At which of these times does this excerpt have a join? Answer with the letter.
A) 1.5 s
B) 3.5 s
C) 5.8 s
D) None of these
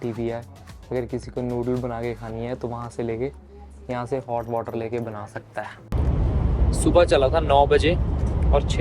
C